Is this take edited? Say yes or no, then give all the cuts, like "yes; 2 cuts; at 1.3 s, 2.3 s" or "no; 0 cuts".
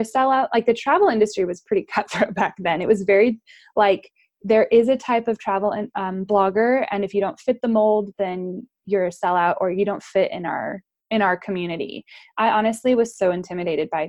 no; 0 cuts